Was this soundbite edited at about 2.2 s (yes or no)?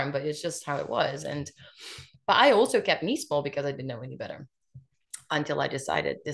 no